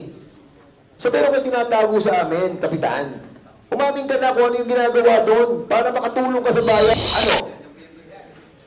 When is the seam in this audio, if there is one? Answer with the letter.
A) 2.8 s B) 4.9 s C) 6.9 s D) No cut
C